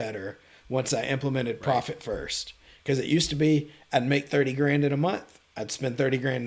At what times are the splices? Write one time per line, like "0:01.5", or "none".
none